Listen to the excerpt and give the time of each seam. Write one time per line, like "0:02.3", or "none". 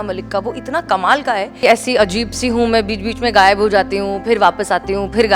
0:01.5